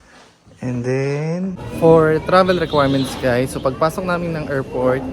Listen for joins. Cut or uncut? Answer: cut